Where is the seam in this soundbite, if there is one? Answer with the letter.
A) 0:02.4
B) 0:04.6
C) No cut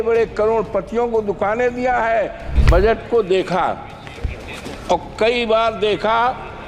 A